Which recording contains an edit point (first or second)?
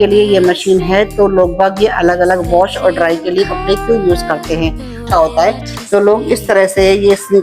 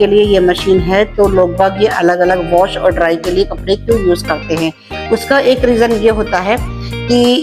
first